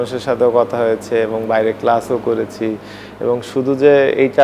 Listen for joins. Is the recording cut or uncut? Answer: uncut